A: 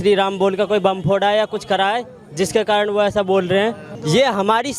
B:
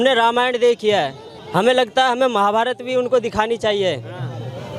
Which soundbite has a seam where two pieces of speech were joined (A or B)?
A